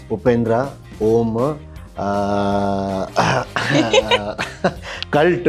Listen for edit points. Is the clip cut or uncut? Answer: uncut